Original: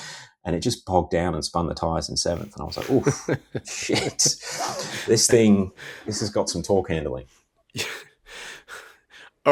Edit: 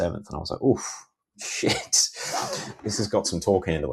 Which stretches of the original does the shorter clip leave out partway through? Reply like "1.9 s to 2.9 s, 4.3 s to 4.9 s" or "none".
4.9 s to 5.8 s